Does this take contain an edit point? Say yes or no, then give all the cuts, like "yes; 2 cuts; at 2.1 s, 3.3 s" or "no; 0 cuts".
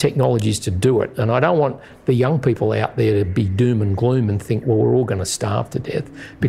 no; 0 cuts